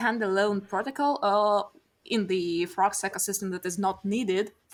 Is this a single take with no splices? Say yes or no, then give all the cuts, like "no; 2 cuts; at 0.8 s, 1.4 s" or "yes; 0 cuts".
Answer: yes; 0 cuts